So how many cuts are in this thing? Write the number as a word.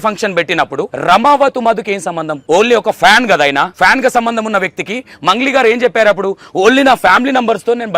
three